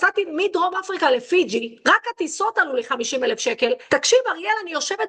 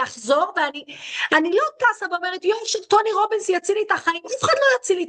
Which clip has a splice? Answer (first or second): first